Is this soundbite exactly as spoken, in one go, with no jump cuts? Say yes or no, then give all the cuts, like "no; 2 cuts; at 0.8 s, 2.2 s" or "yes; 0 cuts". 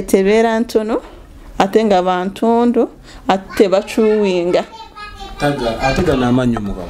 yes; 0 cuts